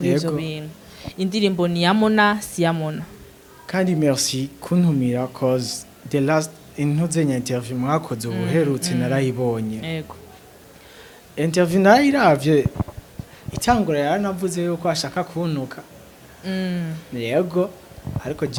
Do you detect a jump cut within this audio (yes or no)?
no